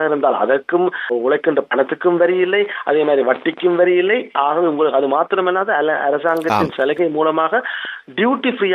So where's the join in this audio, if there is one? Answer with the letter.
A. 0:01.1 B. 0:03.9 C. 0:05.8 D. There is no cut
A